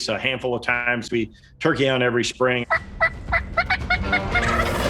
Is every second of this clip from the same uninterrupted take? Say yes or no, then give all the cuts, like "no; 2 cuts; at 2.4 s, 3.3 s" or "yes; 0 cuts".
no; 1 cut; at 2.6 s